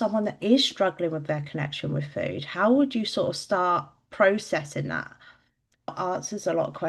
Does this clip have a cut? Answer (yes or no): yes